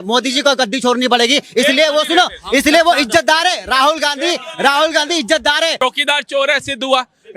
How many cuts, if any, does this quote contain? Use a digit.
1